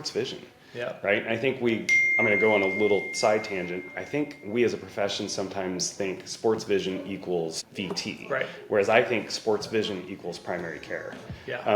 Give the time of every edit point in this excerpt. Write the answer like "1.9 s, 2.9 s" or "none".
7.7 s